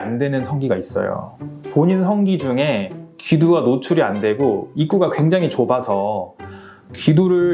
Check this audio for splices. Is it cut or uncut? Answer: cut